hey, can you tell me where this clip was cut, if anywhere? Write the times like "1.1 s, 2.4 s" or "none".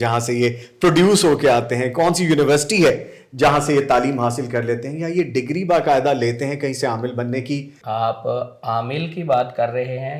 7.7 s